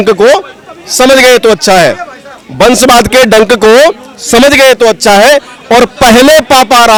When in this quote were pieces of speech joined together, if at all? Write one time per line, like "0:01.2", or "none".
none